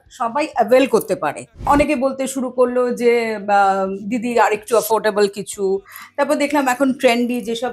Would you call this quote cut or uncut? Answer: cut